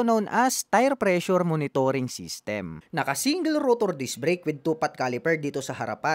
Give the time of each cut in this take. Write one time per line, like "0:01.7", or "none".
0:02.7